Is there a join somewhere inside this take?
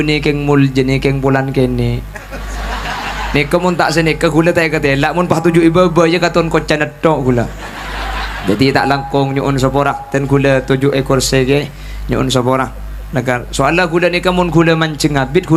no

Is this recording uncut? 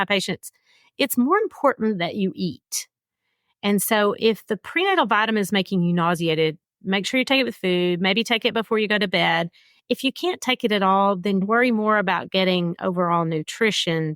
no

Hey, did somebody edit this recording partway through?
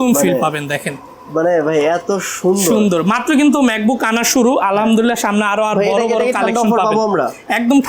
no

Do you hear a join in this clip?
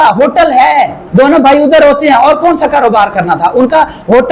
yes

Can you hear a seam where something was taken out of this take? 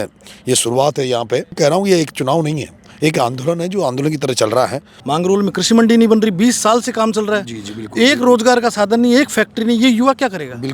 yes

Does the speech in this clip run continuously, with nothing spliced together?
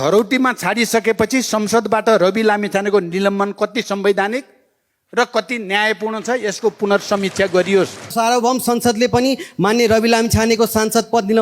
no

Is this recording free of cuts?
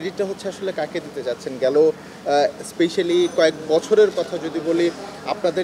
yes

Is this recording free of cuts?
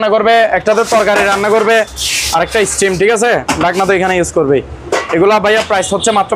yes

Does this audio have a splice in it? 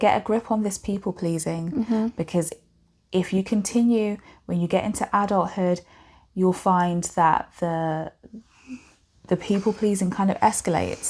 no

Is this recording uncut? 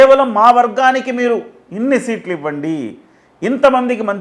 yes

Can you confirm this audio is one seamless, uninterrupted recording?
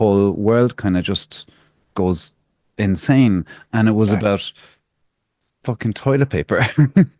yes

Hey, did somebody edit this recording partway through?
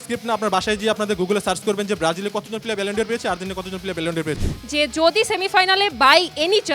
yes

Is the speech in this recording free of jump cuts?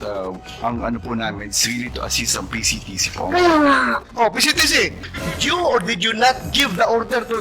no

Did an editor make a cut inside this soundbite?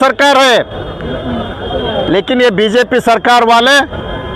no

